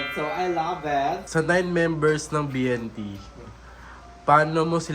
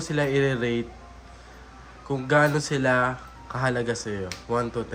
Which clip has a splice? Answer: first; 1 cut; at 1.2 s

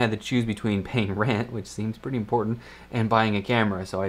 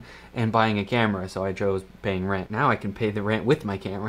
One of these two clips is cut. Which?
second; 1 cut; at 2.5 s

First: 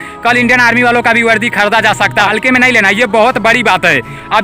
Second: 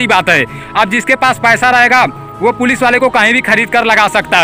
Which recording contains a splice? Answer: first; 1 cut; at 2.3 s

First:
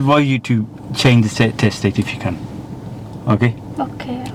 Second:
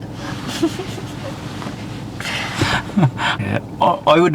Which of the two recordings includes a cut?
second; 1 cut; at 3.4 s

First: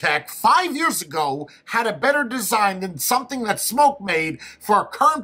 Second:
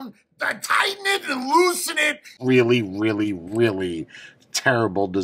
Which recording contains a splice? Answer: second; 1 cut; at 2.4 s

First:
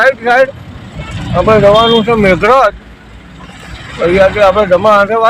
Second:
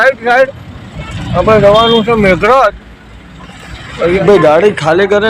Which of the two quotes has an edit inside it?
second; 1 cut; at 4.2 s

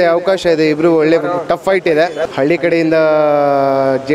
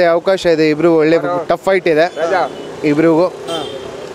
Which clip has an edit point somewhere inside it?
first; 1 cut; at 2.2 s

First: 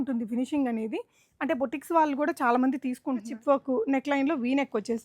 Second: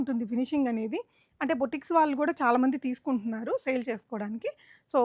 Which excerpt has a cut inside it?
first; 1 cut; at 3.3 s

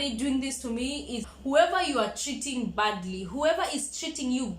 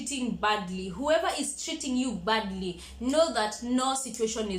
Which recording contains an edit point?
first; 1 cut; at 1.3 s

